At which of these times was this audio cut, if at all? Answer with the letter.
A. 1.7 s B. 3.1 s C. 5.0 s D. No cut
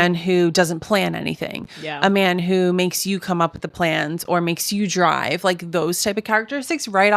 D